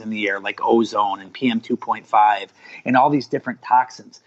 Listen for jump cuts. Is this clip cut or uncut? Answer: uncut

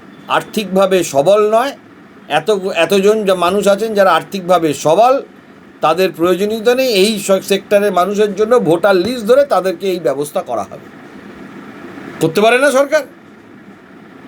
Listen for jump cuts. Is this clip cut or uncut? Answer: uncut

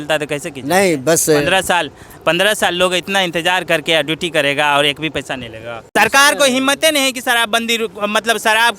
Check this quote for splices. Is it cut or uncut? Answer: cut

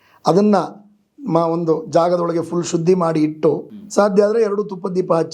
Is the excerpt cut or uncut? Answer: cut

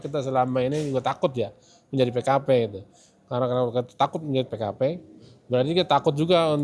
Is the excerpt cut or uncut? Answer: cut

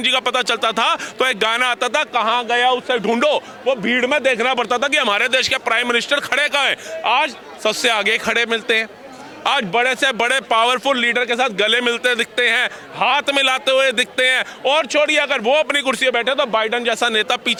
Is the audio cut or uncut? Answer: uncut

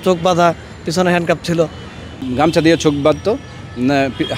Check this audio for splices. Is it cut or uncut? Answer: cut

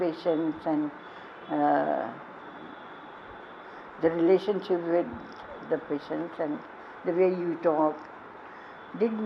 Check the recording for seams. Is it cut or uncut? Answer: uncut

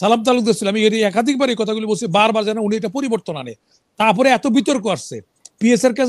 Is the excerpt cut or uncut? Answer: uncut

